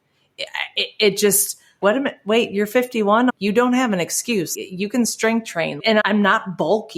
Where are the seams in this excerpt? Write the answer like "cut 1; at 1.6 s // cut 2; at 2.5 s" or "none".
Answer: cut 1; at 1.8 s // cut 2; at 3.3 s // cut 3; at 4.5 s // cut 4; at 6.0 s